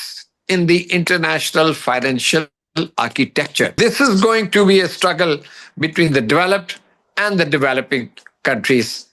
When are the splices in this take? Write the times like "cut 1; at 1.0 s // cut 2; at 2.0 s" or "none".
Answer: cut 1; at 3.8 s